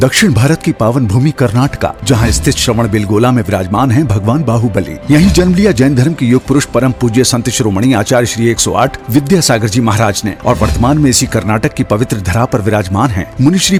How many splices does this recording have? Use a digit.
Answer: 0